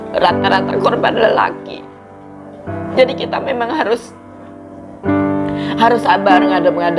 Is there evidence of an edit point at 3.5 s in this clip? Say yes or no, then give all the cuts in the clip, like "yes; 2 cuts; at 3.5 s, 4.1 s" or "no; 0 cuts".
no; 0 cuts